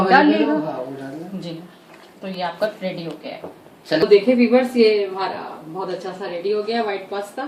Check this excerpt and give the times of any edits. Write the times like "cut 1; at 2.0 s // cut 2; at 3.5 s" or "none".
none